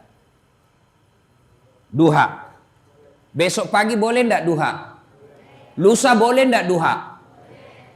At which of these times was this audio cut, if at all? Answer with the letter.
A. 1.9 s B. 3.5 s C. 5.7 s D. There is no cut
D